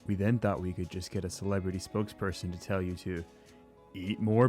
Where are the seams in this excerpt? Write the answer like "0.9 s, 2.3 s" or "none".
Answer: 0.9 s